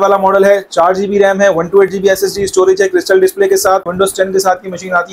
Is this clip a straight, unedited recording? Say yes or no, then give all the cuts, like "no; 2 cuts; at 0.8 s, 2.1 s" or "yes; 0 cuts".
no; 1 cut; at 3.9 s